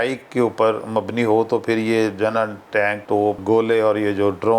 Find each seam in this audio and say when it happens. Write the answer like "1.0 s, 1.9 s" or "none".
3.2 s